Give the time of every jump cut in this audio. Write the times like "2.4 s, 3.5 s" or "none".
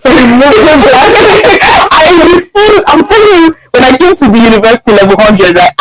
none